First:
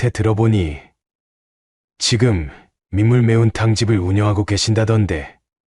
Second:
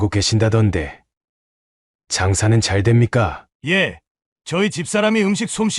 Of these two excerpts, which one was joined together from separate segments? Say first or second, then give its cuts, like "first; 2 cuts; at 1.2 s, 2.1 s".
second; 1 cut; at 3.4 s